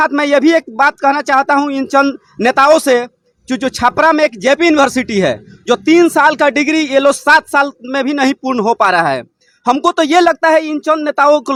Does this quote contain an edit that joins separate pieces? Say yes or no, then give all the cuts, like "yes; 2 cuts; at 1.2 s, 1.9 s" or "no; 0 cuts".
no; 0 cuts